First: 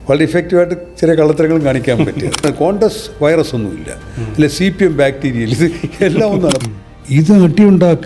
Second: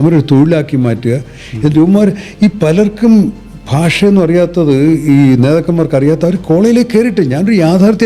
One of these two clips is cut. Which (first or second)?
first